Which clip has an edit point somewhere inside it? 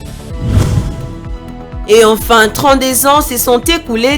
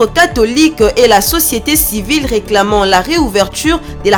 first; 1 cut; at 1.8 s

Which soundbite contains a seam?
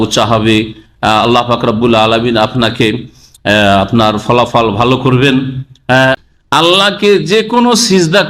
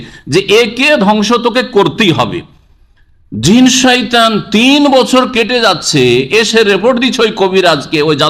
first; 1 cut; at 6.2 s

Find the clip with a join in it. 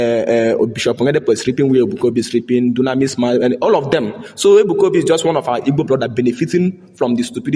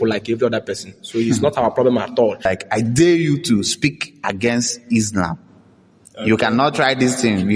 second; 1 cut; at 2.4 s

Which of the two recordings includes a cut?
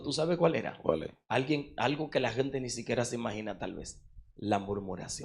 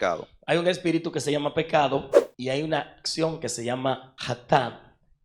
second; 1 cut; at 4.1 s

